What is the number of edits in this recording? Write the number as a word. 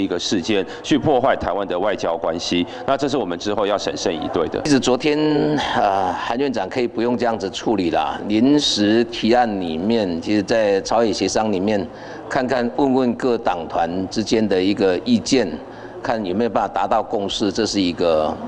one